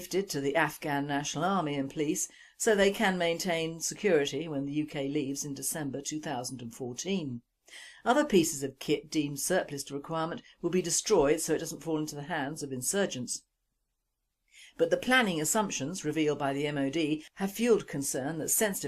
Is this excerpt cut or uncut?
cut